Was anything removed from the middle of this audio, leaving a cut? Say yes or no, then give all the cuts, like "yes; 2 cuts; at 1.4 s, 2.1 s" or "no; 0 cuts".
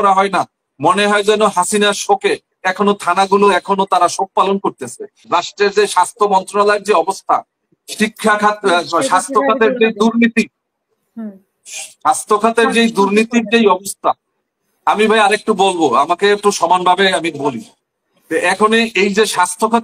yes; 1 cut; at 5.3 s